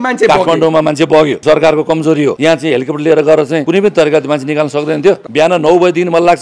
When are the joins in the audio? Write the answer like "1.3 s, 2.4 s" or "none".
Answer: 1.4 s, 2.4 s, 3.6 s, 5.2 s